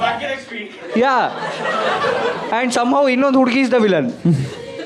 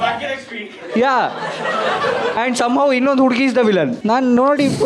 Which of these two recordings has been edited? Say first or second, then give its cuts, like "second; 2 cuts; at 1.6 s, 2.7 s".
second; 2 cuts; at 2.3 s, 4.0 s